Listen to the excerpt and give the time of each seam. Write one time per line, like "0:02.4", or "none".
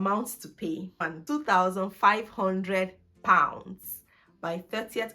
0:01.0